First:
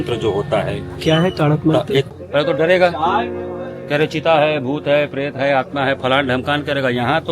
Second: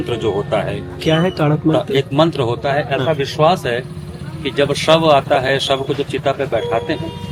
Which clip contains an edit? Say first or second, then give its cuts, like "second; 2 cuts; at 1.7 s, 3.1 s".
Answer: first; 1 cut; at 2.1 s